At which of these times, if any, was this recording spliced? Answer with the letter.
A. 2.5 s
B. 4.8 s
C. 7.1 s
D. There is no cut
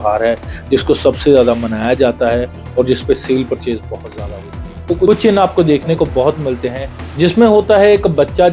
B